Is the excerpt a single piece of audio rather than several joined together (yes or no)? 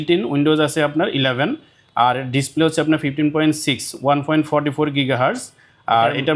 yes